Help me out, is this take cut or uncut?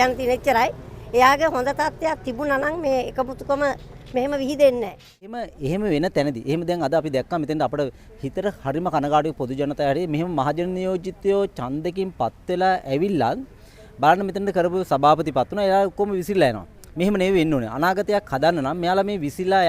cut